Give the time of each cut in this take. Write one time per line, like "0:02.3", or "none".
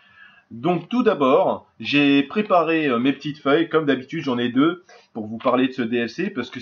0:03.8

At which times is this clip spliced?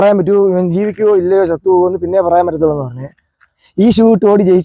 0:03.7

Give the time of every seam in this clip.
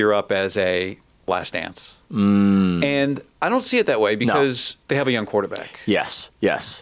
0:01.3

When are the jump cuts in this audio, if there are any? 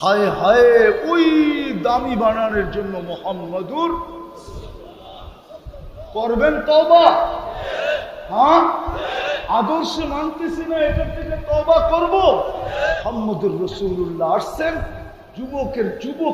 0:12.9

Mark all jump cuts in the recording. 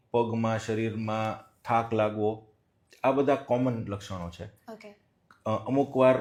none

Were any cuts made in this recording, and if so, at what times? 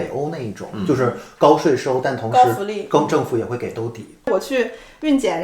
0:04.3

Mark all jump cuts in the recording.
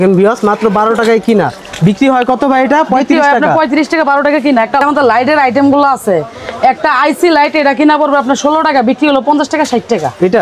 0:04.8

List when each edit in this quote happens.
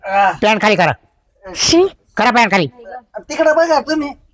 none

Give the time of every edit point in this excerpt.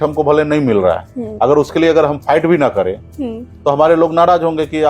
none

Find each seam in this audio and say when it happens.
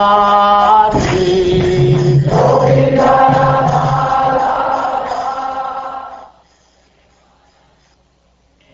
none

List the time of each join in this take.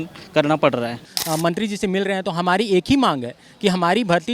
0:01.0

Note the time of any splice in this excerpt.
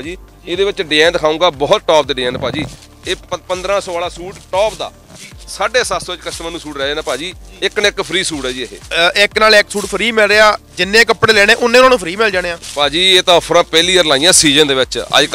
0:08.8

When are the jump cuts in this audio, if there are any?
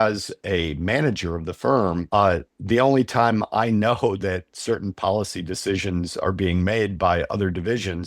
0:02.0

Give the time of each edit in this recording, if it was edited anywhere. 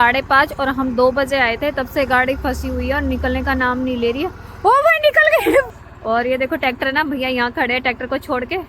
0:05.7

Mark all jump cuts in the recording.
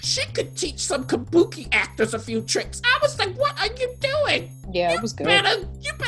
0:04.6

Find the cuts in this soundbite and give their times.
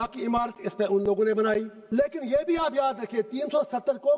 0:01.8

